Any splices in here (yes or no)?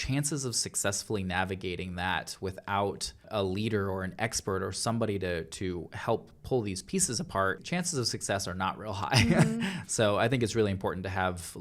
yes